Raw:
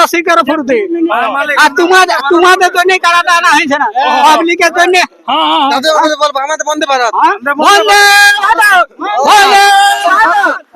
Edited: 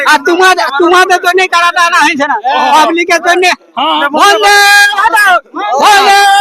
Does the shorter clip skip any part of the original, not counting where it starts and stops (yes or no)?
yes